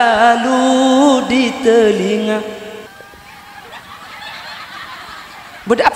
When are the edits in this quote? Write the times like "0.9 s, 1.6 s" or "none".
2.9 s